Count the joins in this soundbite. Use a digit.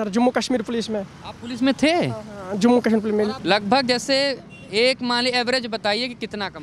1